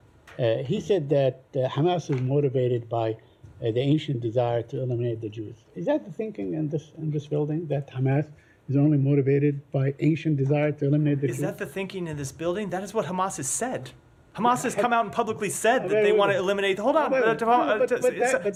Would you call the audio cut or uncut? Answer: uncut